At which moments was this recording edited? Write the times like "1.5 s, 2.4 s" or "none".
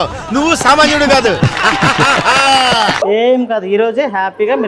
none